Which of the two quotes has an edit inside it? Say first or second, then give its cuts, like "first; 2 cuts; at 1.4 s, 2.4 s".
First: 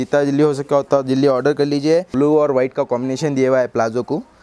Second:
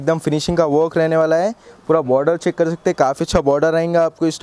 first; 1 cut; at 2.1 s